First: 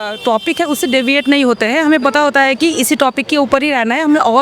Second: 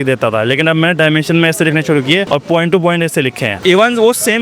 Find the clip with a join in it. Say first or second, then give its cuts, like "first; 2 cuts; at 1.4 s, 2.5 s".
second; 2 cuts; at 2.3 s, 3.6 s